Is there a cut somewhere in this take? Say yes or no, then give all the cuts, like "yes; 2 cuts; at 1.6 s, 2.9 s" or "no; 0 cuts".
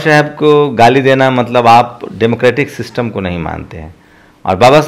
no; 0 cuts